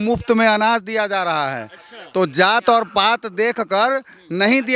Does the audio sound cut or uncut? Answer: uncut